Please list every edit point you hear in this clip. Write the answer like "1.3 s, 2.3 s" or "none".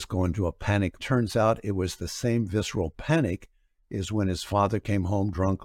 1.0 s